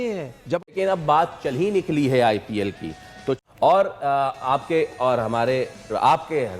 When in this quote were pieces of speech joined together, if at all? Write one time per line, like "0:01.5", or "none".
0:00.7
0:03.4